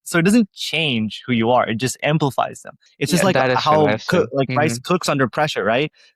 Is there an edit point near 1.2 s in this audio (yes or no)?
no